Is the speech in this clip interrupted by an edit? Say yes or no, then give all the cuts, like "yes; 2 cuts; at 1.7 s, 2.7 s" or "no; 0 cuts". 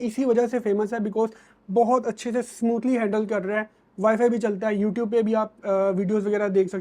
no; 0 cuts